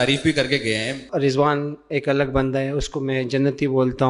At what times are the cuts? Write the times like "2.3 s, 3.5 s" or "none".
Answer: 1.1 s